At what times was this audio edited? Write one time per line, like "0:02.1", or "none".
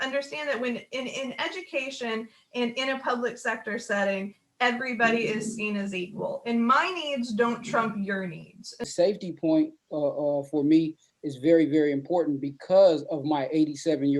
0:08.7